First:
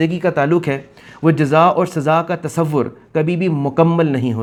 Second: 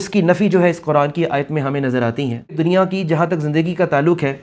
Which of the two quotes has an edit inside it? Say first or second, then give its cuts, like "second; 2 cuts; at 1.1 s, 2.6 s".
second; 1 cut; at 2.6 s